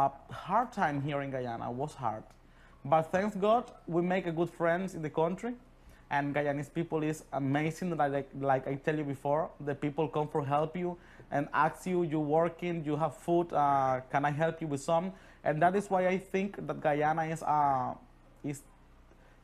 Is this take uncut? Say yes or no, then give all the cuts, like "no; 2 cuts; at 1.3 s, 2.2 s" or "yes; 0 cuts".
yes; 0 cuts